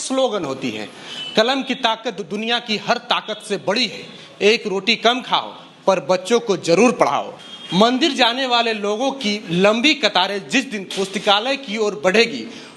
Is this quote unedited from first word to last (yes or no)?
no